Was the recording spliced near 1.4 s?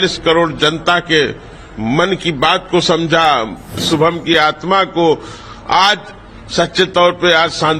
no; 1 cut; at 3.8 s

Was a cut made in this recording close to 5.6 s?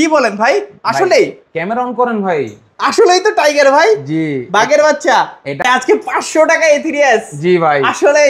yes; 1 cut; at 5.6 s

